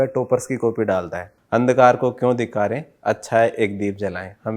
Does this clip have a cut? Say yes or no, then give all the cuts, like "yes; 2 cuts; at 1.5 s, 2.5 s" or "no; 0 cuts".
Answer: yes; 1 cut; at 1.3 s